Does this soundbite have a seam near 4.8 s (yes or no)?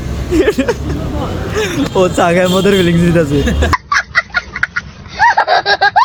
no